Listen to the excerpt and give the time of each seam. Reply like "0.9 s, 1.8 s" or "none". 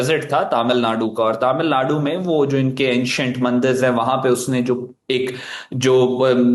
none

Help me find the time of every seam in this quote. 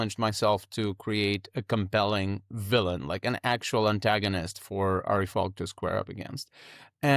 none

